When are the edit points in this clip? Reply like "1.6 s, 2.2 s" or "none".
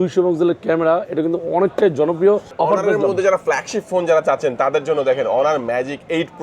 2.5 s